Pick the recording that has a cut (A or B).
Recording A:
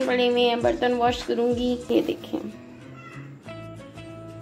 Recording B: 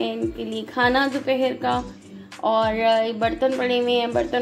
A